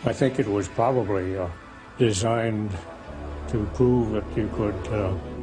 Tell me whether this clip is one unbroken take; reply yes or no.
no